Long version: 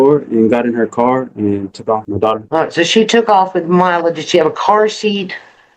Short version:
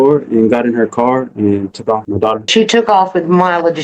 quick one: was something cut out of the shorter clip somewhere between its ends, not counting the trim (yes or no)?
yes